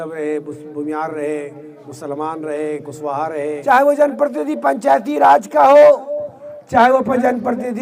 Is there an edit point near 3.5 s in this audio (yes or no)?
yes